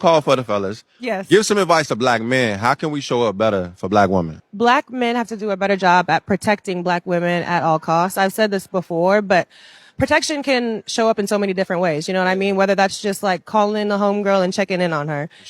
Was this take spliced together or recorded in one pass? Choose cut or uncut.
cut